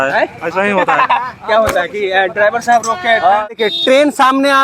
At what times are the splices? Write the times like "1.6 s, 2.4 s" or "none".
3.6 s